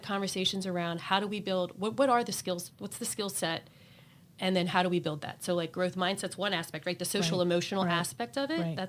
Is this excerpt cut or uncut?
uncut